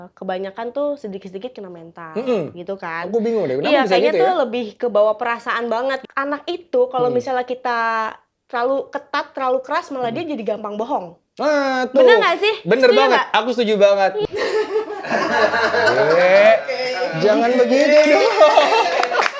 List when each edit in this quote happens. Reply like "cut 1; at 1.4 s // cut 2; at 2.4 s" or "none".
cut 1; at 6.0 s // cut 2; at 14.2 s